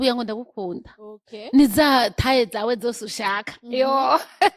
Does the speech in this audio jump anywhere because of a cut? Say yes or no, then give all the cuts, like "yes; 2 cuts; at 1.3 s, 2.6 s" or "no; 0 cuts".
no; 0 cuts